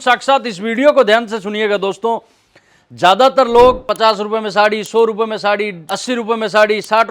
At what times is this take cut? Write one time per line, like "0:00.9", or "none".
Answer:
0:03.9